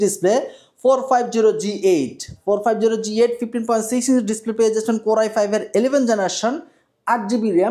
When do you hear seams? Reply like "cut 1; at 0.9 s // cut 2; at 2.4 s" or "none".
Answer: none